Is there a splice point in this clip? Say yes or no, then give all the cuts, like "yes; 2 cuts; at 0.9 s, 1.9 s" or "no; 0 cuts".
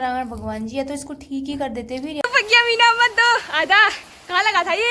yes; 1 cut; at 2.2 s